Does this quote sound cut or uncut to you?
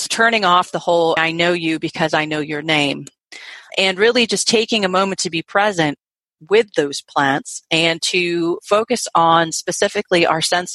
uncut